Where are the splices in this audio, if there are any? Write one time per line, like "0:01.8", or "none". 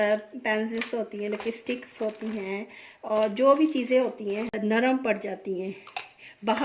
0:04.6